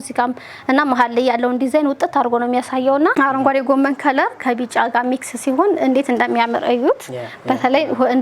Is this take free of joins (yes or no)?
no